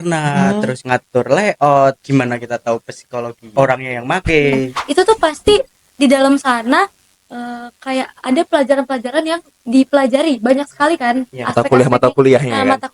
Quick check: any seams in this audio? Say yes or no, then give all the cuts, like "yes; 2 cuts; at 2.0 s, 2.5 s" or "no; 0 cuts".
yes; 4 cuts; at 0.8 s, 2.0 s, 3.5 s, 4.8 s